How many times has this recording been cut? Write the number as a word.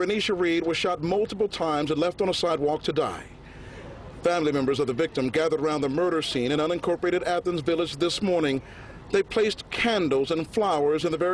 zero